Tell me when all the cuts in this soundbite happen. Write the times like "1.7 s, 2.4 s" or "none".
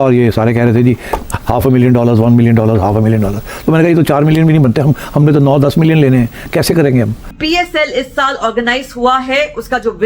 7.3 s